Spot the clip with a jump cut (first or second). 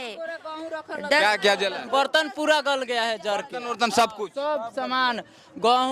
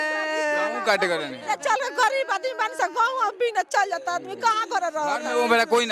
first